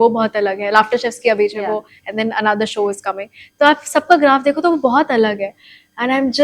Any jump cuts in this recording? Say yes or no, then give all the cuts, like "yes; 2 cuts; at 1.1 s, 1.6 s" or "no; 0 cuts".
no; 0 cuts